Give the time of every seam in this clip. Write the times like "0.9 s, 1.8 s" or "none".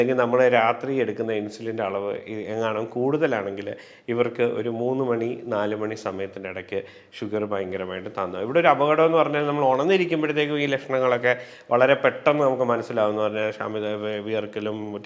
none